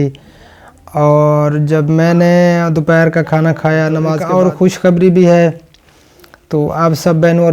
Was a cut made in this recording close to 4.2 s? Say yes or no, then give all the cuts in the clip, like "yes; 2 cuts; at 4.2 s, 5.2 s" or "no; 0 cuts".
yes; 1 cut; at 4.2 s